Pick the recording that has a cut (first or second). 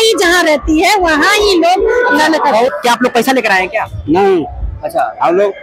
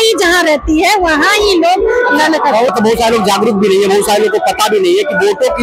first